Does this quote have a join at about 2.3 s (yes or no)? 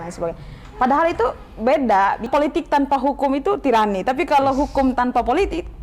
yes